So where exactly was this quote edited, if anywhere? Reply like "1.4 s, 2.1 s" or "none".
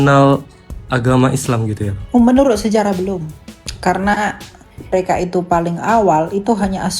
1.9 s, 4.9 s